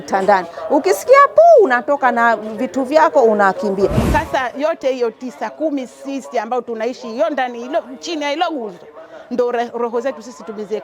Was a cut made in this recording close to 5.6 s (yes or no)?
no